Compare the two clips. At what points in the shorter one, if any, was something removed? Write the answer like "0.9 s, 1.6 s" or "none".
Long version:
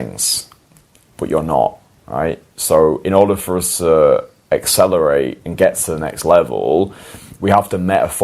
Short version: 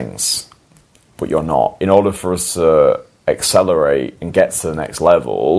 1.8 s